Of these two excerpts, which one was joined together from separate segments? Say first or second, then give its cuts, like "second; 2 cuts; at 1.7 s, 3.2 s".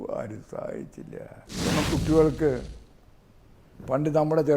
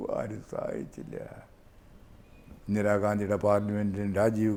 first; 1 cut; at 1.4 s